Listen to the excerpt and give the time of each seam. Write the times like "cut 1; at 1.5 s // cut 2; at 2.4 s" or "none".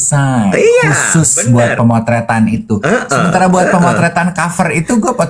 none